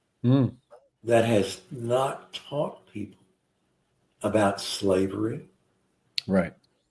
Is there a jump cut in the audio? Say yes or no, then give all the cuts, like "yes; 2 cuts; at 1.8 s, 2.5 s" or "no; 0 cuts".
no; 0 cuts